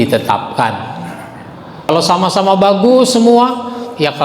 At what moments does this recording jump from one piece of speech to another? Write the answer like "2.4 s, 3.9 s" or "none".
1.9 s